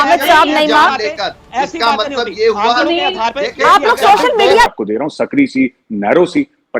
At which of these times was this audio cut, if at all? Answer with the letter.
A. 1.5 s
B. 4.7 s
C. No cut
B